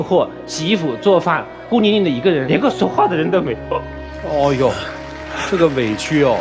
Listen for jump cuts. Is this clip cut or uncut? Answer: uncut